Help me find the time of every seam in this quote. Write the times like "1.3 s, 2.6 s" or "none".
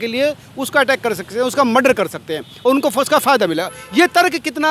none